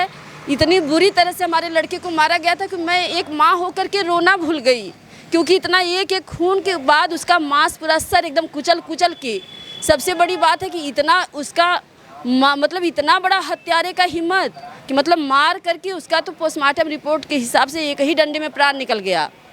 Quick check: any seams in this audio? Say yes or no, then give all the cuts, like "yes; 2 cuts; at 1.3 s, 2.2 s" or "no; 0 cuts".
no; 0 cuts